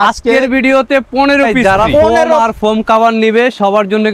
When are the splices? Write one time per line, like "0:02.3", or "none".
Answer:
0:02.4